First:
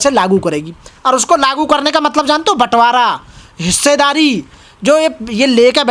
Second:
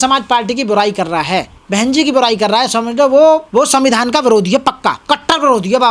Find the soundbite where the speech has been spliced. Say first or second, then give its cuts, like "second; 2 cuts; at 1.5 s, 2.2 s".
second; 3 cuts; at 1.6 s, 3.5 s, 5.0 s